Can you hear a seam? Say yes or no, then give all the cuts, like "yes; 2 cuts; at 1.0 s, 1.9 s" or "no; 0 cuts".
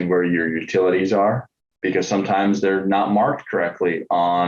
yes; 1 cut; at 1.7 s